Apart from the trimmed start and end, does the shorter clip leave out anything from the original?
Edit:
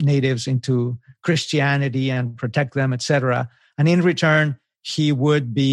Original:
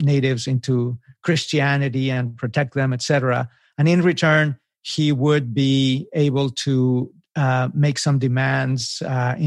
no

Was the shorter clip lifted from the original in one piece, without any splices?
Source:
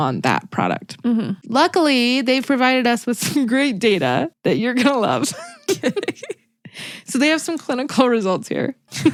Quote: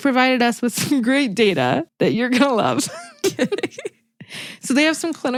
yes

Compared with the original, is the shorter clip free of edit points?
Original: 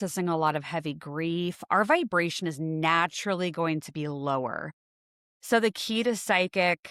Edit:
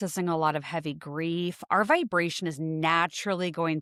yes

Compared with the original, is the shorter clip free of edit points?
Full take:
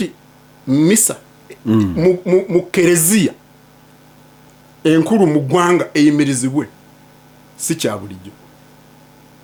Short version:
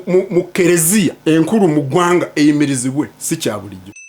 no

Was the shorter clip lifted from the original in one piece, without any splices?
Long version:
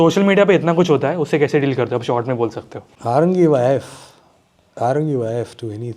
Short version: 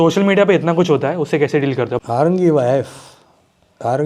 no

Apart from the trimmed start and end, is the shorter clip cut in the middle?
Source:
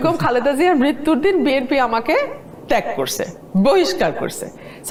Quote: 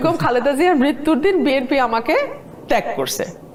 no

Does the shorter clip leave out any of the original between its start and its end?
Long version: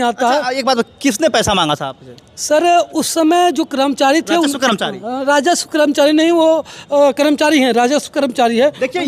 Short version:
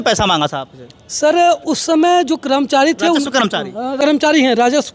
yes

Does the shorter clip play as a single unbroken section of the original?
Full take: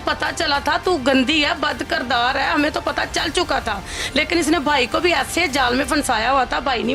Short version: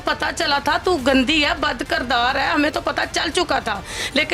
yes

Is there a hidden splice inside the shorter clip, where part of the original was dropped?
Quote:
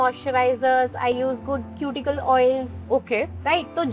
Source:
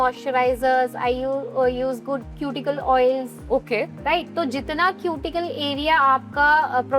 yes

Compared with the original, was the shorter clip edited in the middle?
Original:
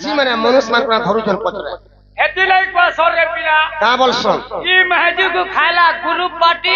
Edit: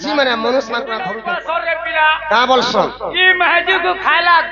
yes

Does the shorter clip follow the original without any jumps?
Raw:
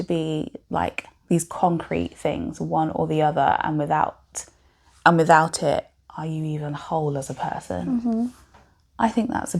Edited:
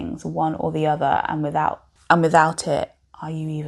no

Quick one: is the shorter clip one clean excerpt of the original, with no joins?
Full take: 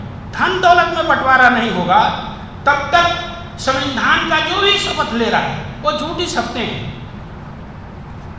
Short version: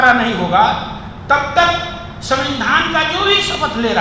yes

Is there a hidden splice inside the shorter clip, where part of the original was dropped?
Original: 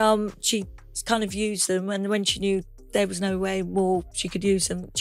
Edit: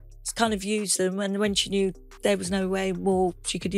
no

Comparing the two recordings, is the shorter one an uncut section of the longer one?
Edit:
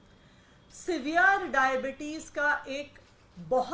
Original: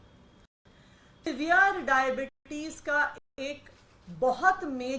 no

